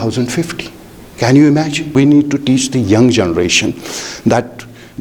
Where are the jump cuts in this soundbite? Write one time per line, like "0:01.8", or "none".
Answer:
0:02.0